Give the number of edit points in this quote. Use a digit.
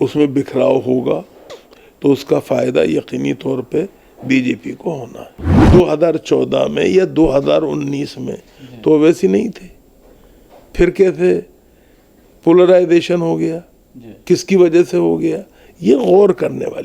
1